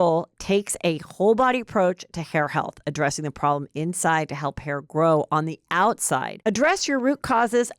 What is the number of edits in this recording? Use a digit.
1